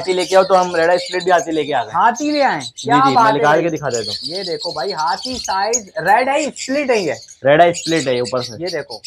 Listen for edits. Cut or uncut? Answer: uncut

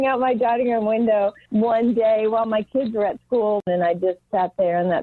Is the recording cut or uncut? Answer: cut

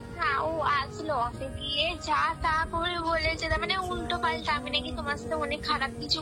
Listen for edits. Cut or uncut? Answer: cut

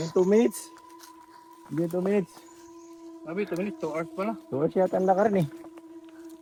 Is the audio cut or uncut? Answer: uncut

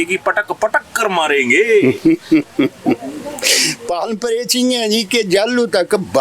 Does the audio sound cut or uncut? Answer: uncut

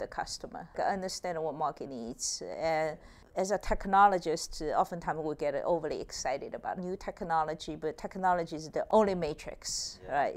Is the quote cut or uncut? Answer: cut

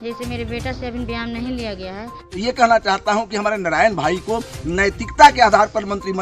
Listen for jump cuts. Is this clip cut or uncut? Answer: cut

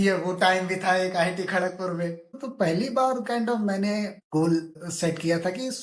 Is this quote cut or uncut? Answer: cut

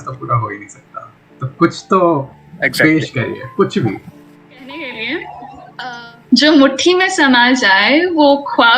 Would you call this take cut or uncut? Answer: cut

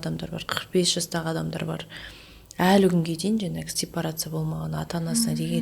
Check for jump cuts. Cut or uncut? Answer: uncut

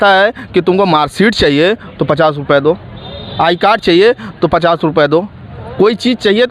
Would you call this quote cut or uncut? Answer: uncut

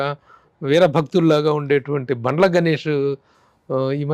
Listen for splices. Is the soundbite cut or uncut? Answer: uncut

